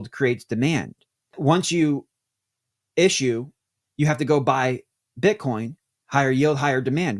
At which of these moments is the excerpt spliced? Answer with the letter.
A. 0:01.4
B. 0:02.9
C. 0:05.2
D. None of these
A